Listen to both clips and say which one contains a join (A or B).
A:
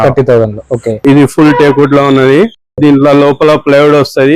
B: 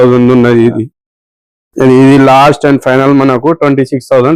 A